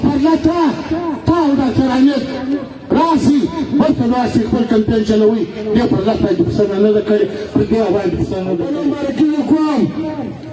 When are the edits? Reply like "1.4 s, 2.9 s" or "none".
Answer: 8.9 s